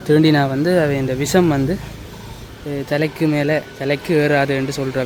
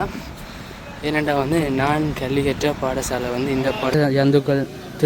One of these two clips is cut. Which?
second; 1 cut; at 3.9 s

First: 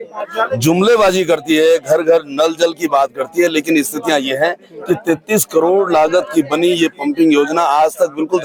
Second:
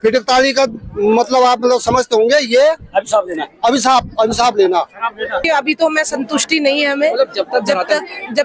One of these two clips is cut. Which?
second; 1 cut; at 5.5 s

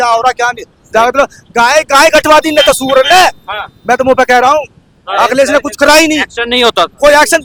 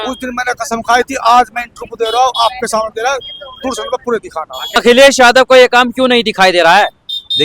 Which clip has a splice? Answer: second; 1 cut; at 4.8 s

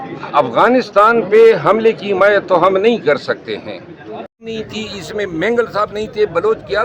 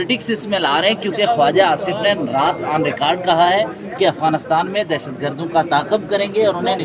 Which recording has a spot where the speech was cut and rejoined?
first; 1 cut; at 4.4 s

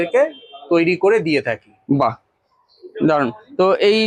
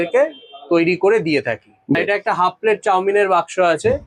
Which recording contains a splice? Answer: second; 1 cut; at 2.0 s

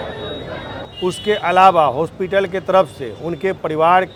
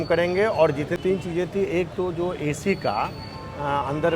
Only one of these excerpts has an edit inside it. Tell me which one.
second; 1 cut; at 1.0 s

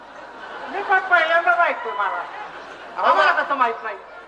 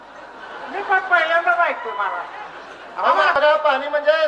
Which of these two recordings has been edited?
second; 1 cut; at 3.4 s

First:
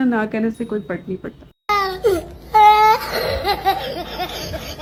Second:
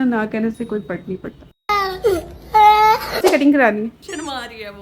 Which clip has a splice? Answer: second; 1 cut; at 3.2 s

